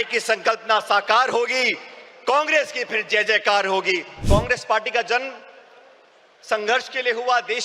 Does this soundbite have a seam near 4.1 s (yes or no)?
yes